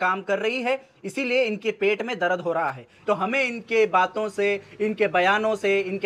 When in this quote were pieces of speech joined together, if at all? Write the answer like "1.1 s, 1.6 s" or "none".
2.9 s